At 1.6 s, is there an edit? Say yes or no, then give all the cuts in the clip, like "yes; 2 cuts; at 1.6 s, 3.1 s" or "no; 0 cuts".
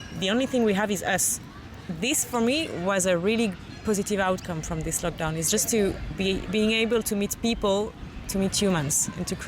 yes; 2 cuts; at 1.6 s, 8.0 s